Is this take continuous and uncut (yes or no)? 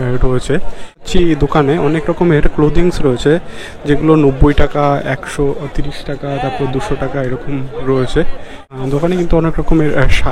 no